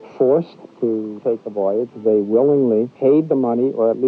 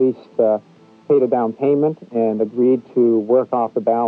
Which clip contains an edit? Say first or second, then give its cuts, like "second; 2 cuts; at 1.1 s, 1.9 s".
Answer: first; 2 cuts; at 0.8 s, 2.9 s